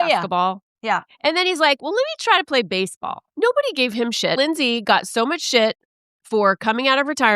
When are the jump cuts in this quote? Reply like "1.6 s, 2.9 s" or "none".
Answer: 3.2 s, 4.4 s